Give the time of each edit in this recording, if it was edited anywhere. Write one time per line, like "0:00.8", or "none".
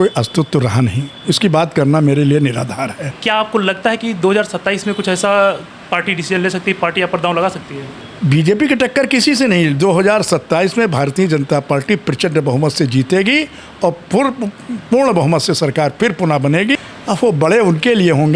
0:03.1
0:08.1
0:16.8